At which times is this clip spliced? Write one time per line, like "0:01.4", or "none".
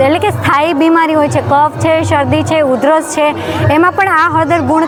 none